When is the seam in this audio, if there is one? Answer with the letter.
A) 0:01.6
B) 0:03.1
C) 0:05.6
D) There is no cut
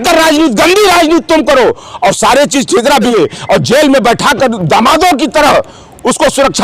B